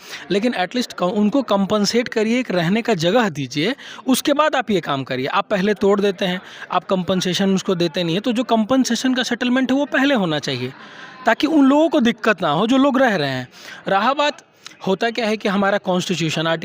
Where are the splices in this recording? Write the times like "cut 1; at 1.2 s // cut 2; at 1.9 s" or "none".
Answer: none